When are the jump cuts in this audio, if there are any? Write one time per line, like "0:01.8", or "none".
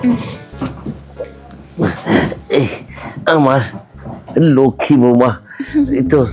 none